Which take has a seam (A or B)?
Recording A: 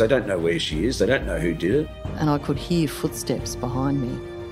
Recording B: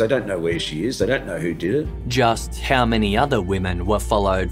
A